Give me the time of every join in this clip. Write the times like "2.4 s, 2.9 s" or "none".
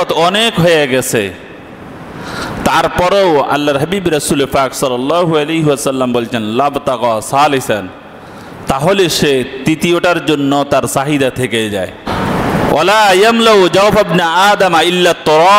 12.0 s